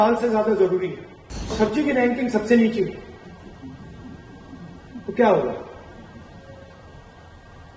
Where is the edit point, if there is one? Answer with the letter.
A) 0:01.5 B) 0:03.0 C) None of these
A